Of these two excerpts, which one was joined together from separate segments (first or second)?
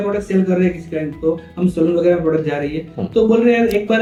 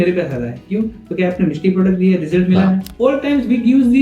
second